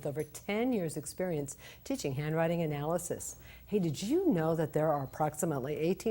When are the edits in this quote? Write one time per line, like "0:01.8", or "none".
0:02.4

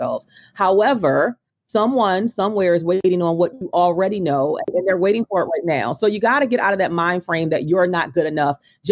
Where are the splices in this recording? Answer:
0:04.8

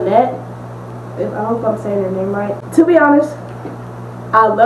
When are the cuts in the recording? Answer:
0:02.6

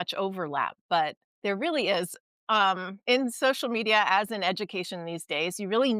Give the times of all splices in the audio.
0:01.2
0:02.9

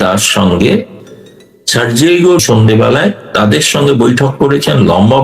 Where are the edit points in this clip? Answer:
0:01.0
0:02.4

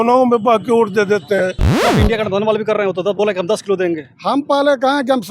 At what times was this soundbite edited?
0:01.8

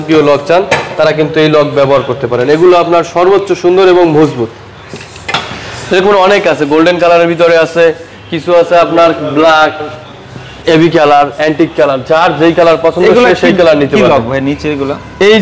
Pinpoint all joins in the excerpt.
none

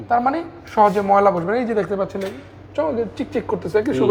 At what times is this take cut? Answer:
none

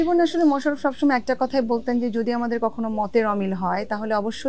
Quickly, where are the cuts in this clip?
none

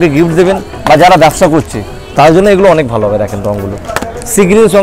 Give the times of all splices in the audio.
none

